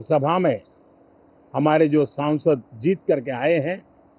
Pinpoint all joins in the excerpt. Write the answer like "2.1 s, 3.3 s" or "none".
none